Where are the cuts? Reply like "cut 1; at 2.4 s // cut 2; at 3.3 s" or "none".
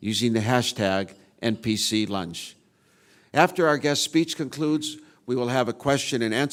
none